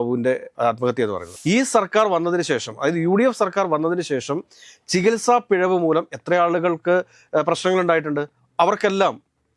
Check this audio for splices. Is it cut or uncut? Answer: cut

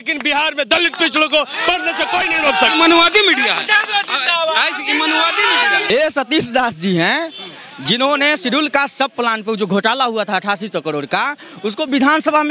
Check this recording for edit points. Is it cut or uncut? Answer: cut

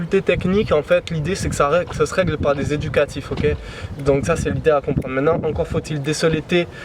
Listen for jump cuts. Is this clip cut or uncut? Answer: uncut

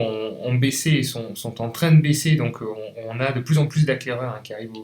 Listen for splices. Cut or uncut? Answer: uncut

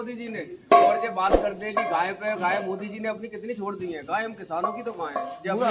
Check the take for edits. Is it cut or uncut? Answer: uncut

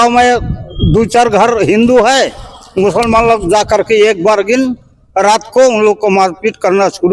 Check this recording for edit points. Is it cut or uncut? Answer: uncut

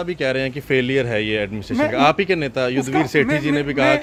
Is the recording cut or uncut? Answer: uncut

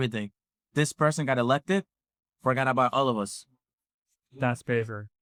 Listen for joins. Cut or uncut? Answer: uncut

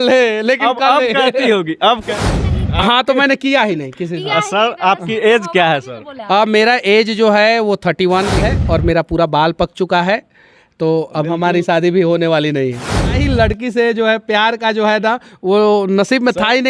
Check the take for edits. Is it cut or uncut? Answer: cut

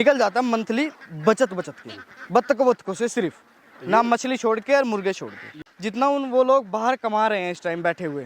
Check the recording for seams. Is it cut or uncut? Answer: cut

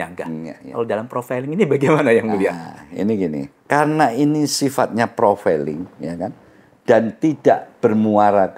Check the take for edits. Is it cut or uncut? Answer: uncut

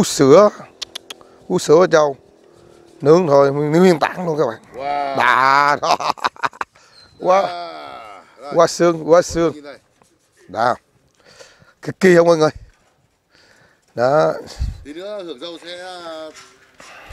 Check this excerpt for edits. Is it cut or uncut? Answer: uncut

